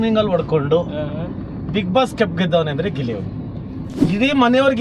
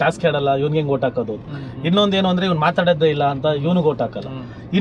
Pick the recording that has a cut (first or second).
first